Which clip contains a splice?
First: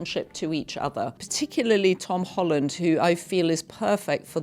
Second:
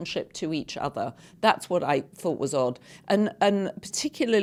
first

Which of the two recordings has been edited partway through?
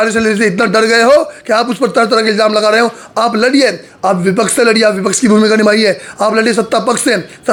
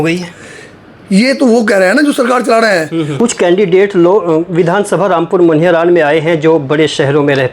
second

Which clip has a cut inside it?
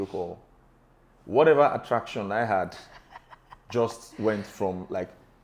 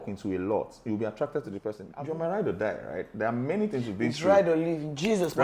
second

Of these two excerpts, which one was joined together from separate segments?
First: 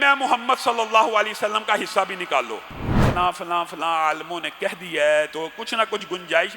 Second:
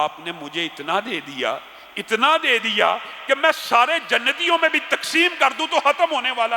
first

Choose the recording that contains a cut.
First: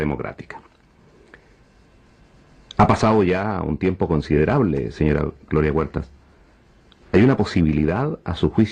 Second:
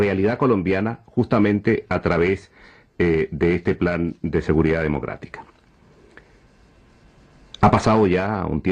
second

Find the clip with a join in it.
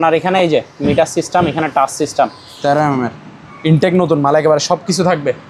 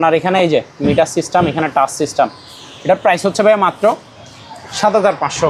first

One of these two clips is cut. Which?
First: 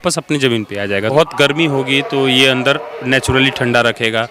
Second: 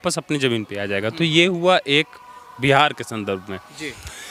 first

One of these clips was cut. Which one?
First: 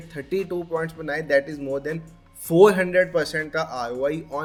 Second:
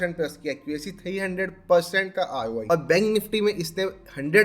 second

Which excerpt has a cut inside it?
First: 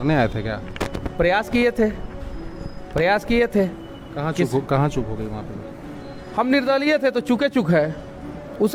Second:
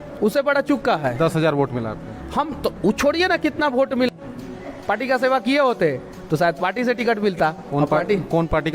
second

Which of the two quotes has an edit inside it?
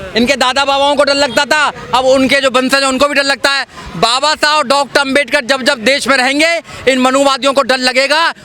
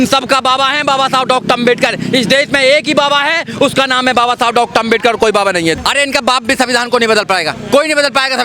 second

